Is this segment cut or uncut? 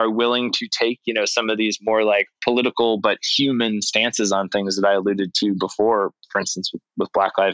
uncut